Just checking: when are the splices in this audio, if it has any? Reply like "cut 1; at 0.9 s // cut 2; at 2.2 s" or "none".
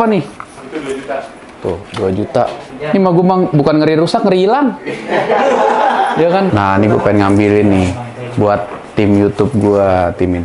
cut 1; at 2.7 s // cut 2; at 6.5 s